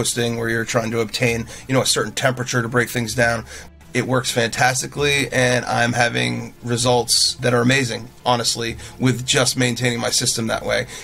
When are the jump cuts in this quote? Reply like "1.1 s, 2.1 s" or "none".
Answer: 3.6 s, 7.3 s